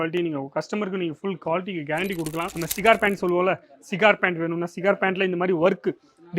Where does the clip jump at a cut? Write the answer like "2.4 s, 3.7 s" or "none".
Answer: 2.6 s